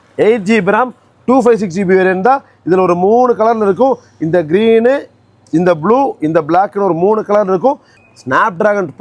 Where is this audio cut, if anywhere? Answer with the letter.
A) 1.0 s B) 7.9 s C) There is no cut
B